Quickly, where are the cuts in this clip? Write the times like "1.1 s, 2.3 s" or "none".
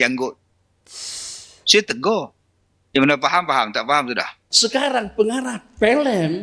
4.4 s